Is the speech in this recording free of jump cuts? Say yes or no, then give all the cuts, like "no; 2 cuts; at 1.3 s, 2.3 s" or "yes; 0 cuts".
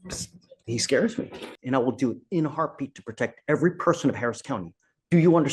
no; 1 cut; at 1.5 s